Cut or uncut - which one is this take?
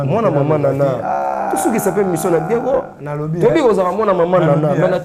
uncut